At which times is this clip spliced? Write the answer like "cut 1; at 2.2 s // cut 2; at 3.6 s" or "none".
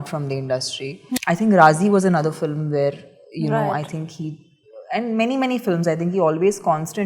cut 1; at 1.1 s